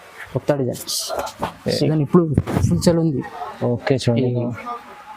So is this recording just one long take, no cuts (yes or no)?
no